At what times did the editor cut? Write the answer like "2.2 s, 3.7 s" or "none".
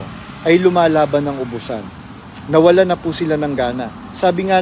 none